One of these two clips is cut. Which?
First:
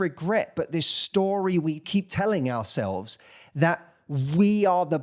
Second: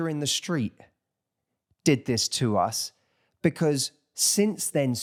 first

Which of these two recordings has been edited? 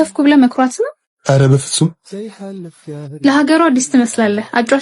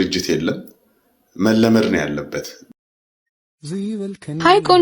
second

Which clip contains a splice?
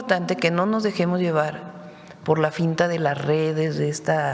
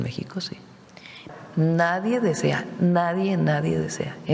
second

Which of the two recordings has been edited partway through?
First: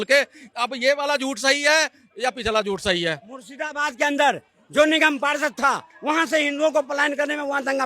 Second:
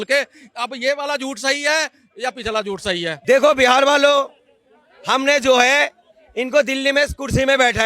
second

